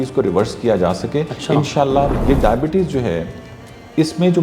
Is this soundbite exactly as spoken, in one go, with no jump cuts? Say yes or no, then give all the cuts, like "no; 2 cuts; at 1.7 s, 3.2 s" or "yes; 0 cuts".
no; 1 cut; at 2.2 s